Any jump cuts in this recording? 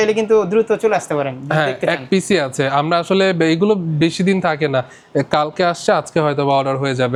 no; 0 cuts

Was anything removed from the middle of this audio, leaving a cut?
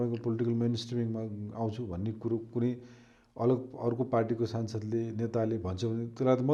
no; 0 cuts

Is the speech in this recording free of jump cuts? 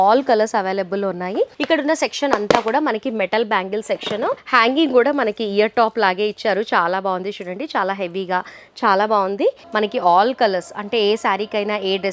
no; 3 cuts; at 1.6 s, 4.4 s, 9.6 s

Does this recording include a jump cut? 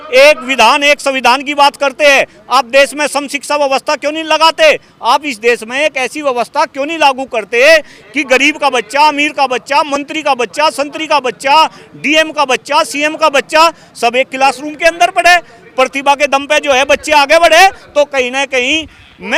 no; 0 cuts

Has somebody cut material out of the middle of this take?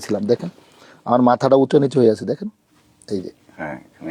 no; 0 cuts

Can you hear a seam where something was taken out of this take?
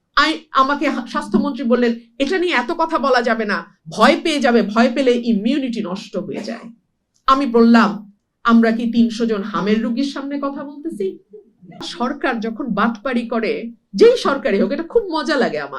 yes; 1 cut; at 11.9 s

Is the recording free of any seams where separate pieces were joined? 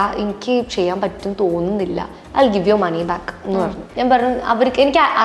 no; 1 cut; at 3.8 s

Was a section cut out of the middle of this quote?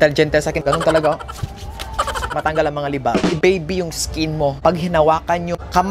yes; 1 cut; at 3.3 s

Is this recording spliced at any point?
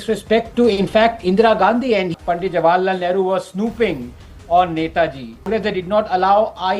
yes; 2 cuts; at 2.2 s, 5.5 s

